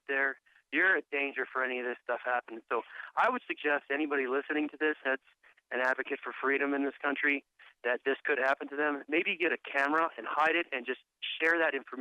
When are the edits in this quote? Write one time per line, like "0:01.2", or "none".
0:10.3